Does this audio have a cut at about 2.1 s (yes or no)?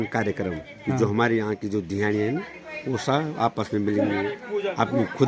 no